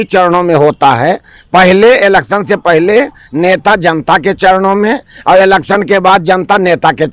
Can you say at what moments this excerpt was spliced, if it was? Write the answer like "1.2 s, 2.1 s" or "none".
none